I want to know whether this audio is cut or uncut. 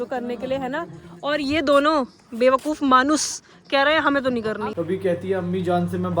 cut